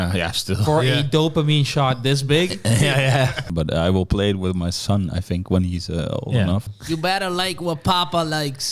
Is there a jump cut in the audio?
yes; 2 cuts; at 3.5 s, 6.7 s

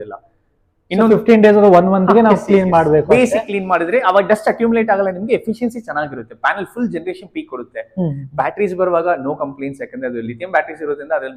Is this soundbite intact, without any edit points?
yes; 0 cuts

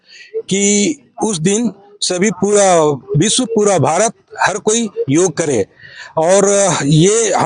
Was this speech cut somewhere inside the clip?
no; 0 cuts

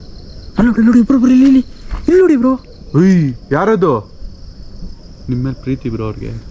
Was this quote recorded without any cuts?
yes; 0 cuts

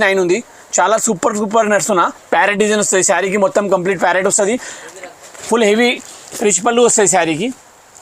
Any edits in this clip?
no; 0 cuts

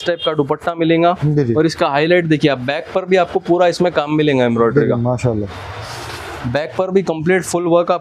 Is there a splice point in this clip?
no; 0 cuts

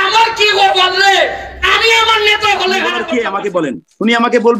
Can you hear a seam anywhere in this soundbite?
yes; 1 cut; at 3.0 s

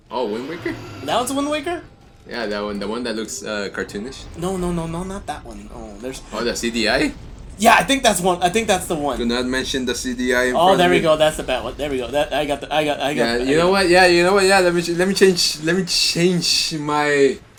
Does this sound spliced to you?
no; 0 cuts

